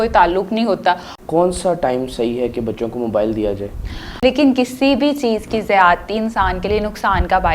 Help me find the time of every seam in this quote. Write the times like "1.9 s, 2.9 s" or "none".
1.1 s, 4.0 s